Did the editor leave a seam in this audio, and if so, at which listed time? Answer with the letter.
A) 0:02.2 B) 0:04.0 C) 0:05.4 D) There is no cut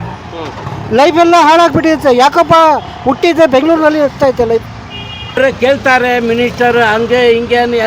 C